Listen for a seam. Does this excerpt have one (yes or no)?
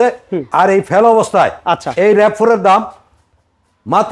no